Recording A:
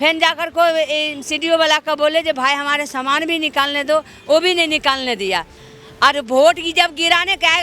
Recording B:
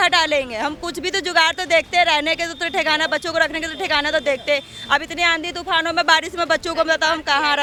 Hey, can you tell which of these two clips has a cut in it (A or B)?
A